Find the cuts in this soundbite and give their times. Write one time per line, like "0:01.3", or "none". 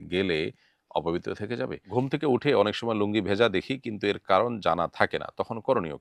0:01.8